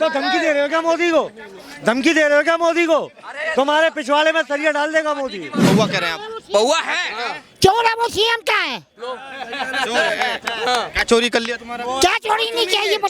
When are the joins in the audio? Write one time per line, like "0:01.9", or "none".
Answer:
0:05.7